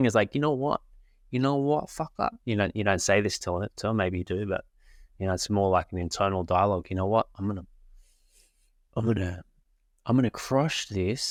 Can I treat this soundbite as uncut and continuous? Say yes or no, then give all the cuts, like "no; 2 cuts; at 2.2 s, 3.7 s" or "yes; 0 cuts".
yes; 0 cuts